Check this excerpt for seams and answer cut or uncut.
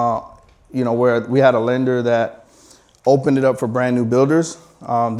uncut